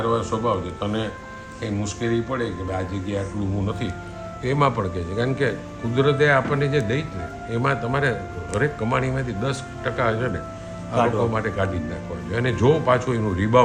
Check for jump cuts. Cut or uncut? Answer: uncut